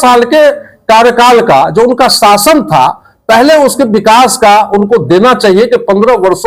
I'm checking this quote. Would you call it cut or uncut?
uncut